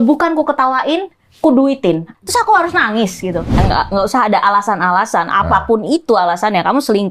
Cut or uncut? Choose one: cut